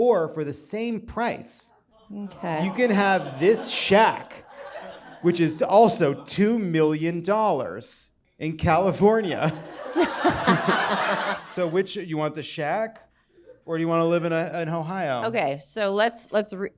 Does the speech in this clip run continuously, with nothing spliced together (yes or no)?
no